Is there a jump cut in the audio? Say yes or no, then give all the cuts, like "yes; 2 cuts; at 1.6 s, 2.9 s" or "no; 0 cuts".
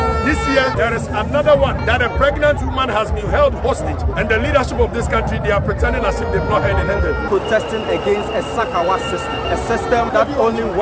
yes; 5 cuts; at 0.7 s, 1.8 s, 4.1 s, 7.3 s, 10.1 s